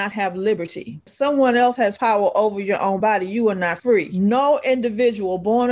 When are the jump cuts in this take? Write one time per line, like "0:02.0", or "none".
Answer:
0:01.1
0:04.1